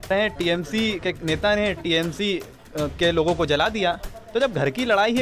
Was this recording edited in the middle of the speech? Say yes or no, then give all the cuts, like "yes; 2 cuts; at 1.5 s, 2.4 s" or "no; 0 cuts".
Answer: no; 0 cuts